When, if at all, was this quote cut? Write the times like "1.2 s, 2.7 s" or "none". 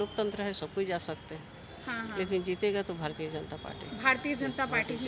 none